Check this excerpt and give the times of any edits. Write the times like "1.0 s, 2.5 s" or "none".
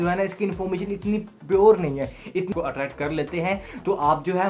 2.5 s